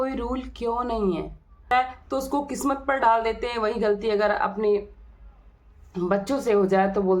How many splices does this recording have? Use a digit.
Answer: 1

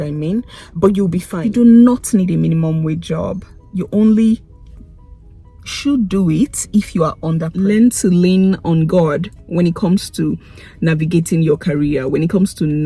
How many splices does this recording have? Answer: 2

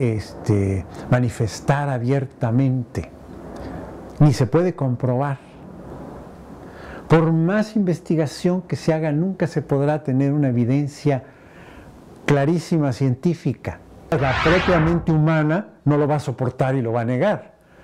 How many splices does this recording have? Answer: 1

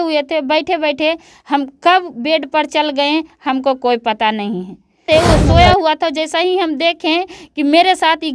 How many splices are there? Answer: 1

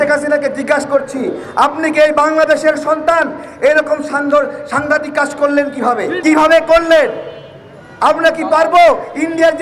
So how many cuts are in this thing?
1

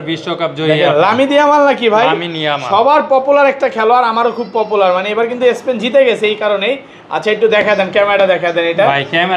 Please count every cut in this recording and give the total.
0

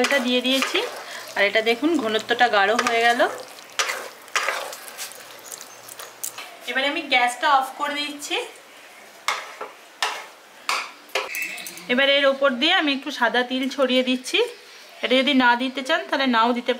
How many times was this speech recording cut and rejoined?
2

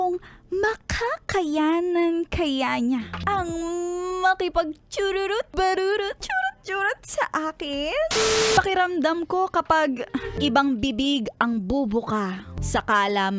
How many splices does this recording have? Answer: 6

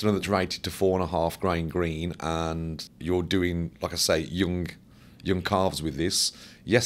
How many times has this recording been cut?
1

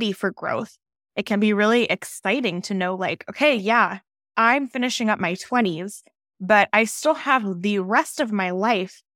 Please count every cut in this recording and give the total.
0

